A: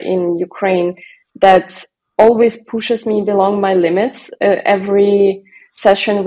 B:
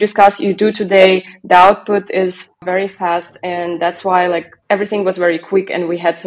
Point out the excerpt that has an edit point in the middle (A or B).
B